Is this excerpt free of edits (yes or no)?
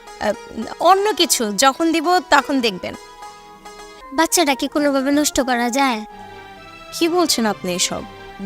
no